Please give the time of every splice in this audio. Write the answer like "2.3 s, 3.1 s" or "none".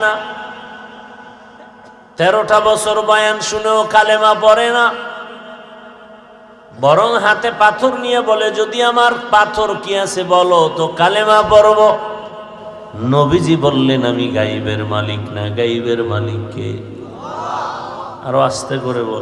2.1 s